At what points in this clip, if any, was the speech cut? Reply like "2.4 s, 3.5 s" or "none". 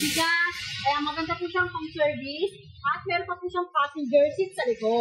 none